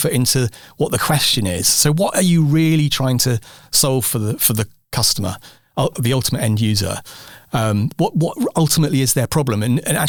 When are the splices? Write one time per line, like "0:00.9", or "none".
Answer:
none